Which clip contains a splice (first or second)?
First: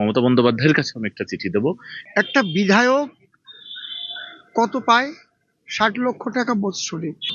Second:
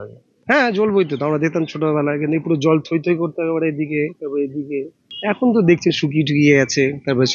first